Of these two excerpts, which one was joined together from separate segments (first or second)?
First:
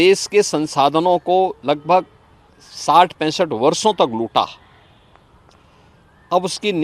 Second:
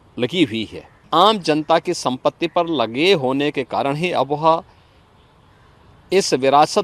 second